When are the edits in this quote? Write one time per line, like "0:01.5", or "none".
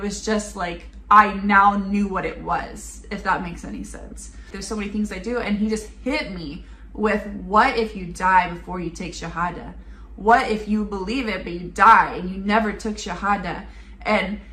0:04.6